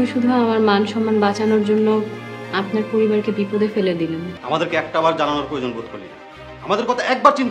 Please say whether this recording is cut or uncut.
cut